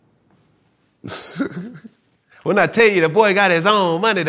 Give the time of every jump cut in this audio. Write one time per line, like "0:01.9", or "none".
0:02.2